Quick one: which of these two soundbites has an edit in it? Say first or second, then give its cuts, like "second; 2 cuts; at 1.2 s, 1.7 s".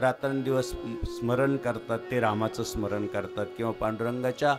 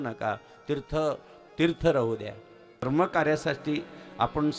second; 1 cut; at 2.9 s